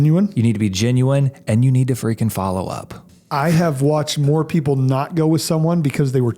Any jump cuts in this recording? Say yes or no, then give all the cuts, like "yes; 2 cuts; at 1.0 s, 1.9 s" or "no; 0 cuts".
yes; 1 cut; at 3.0 s